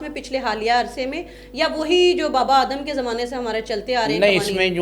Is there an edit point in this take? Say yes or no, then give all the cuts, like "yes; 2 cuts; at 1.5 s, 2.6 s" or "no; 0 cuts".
no; 0 cuts